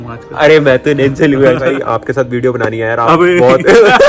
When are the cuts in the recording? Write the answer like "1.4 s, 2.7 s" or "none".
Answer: 1.7 s